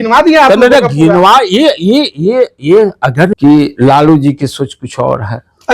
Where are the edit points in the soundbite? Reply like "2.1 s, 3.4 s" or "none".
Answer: 3.3 s